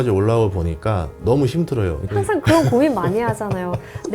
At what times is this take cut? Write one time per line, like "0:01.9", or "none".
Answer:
0:02.0